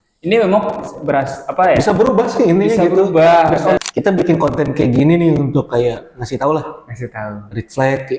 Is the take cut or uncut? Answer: cut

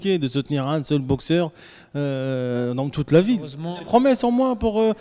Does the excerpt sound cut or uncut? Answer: cut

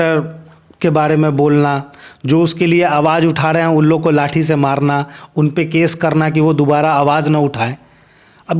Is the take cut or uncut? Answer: uncut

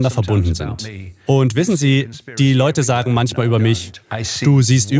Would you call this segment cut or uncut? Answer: uncut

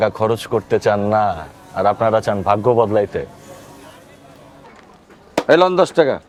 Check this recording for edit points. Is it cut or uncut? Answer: uncut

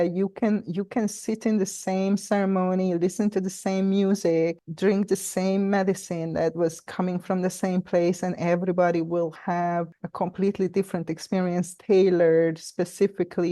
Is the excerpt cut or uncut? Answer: uncut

